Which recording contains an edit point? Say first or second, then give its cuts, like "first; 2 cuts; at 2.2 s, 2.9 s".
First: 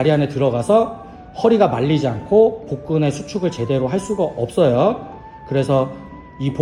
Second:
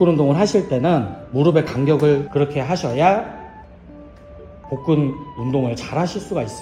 second; 1 cut; at 2.3 s